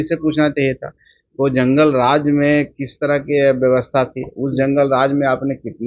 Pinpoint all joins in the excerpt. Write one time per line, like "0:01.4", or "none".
none